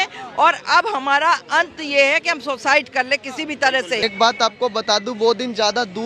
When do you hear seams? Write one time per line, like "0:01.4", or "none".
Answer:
0:04.0